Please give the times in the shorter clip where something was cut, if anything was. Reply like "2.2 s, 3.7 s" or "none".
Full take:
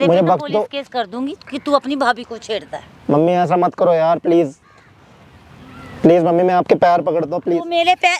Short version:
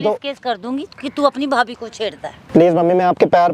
2.3 s